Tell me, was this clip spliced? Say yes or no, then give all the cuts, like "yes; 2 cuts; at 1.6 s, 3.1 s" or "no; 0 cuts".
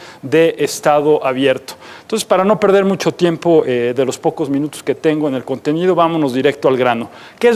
no; 0 cuts